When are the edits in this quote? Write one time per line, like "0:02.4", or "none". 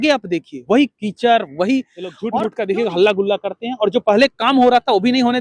0:02.2